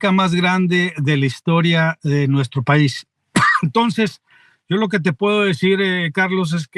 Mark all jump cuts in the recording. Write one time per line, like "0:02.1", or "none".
none

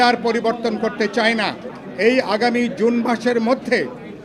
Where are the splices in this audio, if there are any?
0:01.6

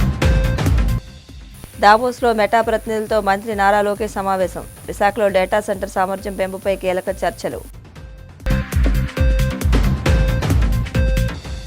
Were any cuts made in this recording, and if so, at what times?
0:00.9

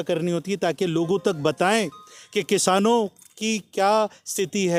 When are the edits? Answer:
none

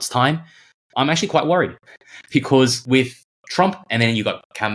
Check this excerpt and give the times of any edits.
0:03.3

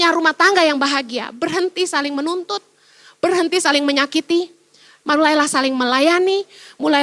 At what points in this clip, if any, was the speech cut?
none

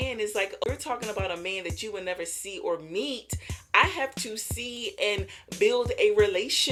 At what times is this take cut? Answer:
none

